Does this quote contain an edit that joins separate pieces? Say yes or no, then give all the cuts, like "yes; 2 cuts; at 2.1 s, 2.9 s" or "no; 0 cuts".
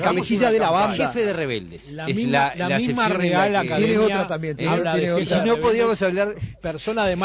yes; 1 cut; at 5.1 s